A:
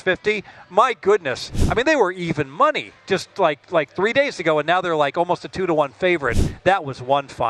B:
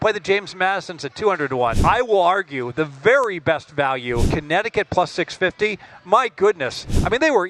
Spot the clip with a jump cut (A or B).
B